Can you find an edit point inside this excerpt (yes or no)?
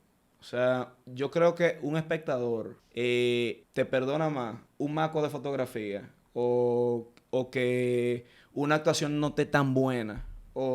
yes